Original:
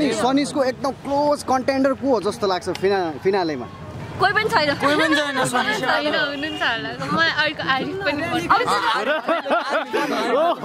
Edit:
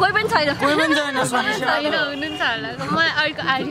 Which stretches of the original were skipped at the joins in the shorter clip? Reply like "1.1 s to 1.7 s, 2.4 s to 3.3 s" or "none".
none

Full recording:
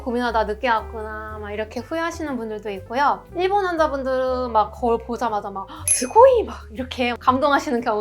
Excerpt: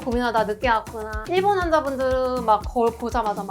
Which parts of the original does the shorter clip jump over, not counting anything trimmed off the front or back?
1.2 s to 3.3 s

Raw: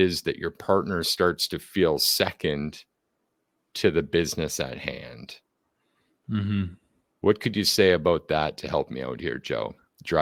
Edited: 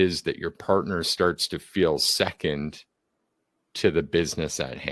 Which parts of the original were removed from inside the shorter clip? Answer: none

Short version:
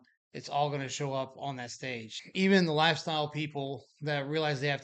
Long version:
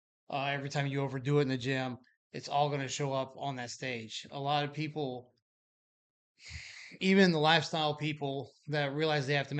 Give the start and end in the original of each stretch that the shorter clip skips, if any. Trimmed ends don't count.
4.2 s to 6.8 s

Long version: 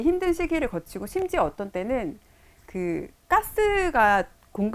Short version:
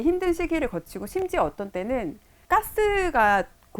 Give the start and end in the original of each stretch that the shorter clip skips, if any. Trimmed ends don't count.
2.3 s to 3.1 s

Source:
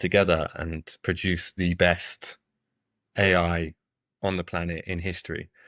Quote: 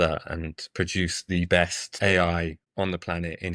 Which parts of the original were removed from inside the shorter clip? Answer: 2.1 s to 3.0 s, 3.8 s to 4.1 s

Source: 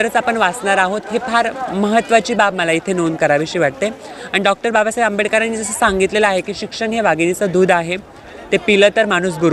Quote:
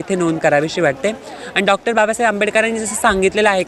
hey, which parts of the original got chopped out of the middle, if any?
none

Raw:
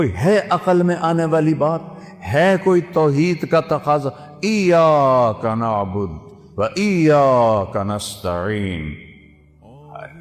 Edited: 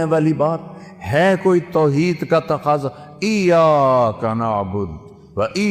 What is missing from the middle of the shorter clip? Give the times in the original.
none

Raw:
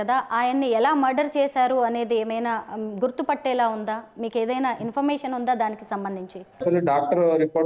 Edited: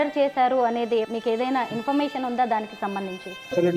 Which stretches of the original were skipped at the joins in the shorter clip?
2.3 s to 4.2 s

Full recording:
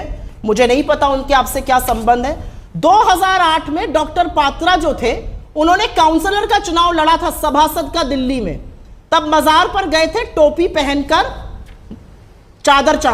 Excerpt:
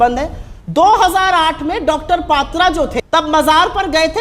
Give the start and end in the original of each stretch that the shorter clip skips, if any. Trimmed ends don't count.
5.0 s to 8.9 s

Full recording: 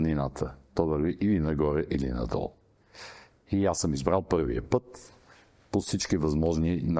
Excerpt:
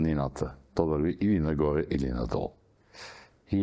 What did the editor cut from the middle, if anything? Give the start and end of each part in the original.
none

